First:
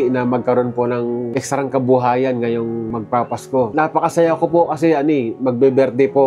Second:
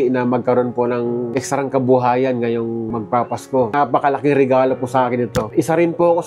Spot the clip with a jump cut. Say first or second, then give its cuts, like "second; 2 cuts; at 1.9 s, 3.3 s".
second; 2 cuts; at 3.7 s, 5.5 s